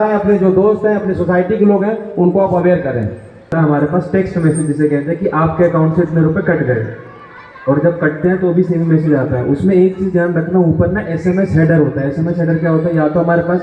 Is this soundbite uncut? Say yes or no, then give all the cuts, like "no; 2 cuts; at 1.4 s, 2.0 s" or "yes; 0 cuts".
no; 1 cut; at 3.5 s